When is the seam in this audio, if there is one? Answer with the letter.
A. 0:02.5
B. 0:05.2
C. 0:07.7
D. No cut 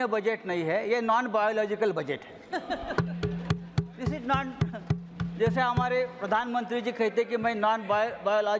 D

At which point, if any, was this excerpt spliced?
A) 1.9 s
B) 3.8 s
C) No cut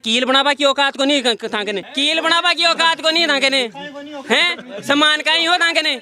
A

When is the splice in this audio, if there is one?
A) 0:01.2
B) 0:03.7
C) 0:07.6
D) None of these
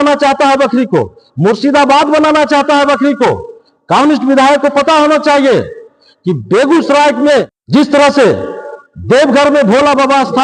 C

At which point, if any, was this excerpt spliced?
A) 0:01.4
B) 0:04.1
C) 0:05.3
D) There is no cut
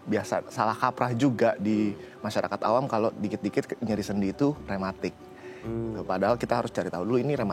D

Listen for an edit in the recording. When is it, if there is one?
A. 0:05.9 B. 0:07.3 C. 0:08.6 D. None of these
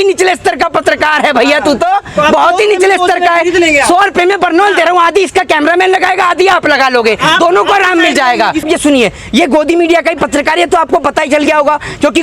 C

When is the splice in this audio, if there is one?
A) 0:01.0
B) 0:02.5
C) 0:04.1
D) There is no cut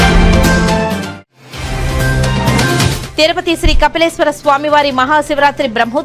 D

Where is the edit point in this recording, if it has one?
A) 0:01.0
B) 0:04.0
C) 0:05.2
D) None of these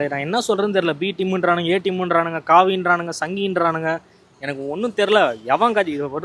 D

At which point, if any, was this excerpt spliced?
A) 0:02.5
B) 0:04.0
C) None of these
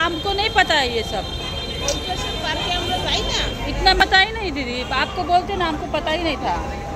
B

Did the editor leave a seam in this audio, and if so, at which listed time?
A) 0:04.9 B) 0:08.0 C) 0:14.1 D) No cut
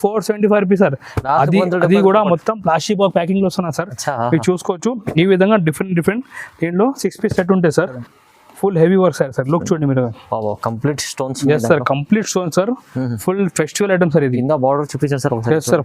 B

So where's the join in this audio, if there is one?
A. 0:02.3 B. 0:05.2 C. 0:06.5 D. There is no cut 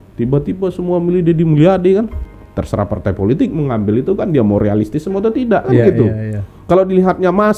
A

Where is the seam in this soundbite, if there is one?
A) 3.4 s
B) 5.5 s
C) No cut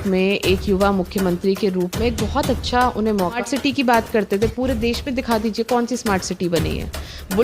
A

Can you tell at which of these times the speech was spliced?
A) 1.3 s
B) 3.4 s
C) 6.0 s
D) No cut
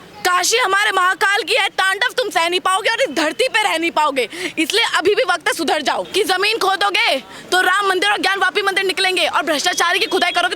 C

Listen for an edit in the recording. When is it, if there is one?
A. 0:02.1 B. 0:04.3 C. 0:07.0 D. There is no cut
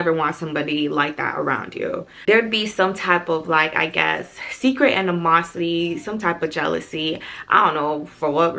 A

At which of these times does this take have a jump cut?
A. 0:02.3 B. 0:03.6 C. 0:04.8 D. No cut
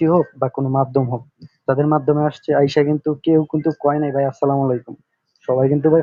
D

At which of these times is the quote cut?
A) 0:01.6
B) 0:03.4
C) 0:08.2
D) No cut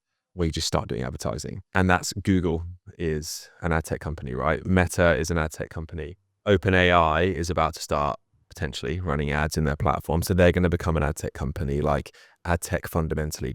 A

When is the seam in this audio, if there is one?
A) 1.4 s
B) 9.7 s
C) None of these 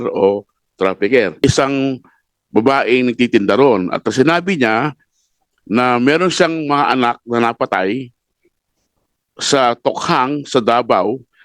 A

